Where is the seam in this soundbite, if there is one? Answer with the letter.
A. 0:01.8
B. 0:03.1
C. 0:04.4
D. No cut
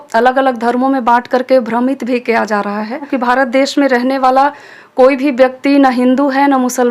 B